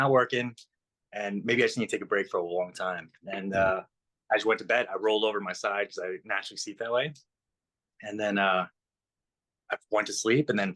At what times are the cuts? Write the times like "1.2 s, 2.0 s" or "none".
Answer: none